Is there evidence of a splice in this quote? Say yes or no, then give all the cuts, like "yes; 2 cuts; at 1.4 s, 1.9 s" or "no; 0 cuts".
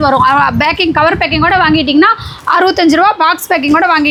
no; 0 cuts